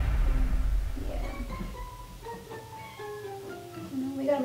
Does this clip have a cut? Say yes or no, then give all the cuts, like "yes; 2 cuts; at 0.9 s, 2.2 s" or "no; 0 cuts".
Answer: no; 0 cuts